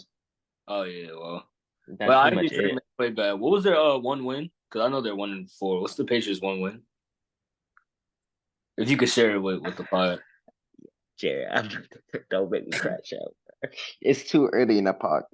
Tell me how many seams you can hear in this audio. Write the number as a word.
zero